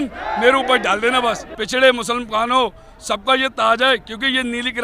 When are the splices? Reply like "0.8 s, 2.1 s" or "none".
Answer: 1.5 s